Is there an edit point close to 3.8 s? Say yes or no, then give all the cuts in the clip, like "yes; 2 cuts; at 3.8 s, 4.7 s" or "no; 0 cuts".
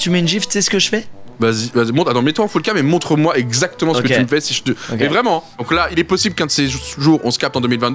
no; 1 cut; at 5.5 s